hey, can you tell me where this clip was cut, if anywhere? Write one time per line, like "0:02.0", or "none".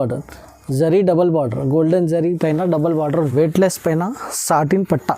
0:03.3